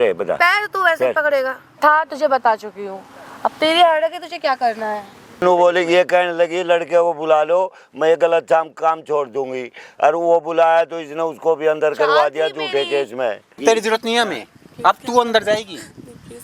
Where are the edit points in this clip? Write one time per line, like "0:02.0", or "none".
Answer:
0:01.8
0:05.4
0:13.6